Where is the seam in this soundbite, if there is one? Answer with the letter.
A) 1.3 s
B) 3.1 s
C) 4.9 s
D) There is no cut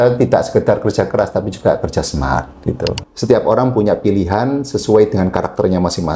B